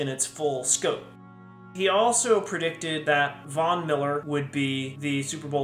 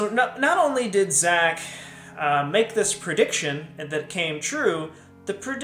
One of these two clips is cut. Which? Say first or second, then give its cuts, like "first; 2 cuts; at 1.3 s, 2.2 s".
first; 3 cuts; at 1.7 s, 3.2 s, 4.6 s